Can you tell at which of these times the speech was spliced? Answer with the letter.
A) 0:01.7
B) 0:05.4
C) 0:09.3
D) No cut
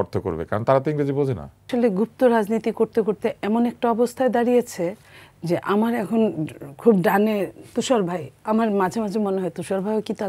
A